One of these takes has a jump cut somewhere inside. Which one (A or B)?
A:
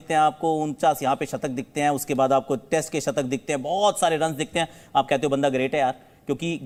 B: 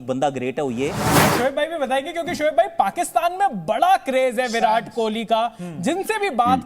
B